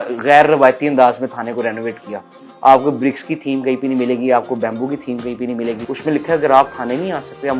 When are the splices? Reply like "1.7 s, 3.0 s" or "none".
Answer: 5.9 s